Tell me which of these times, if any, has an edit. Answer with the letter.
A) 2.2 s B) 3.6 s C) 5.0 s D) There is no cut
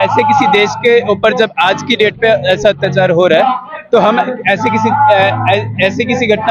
D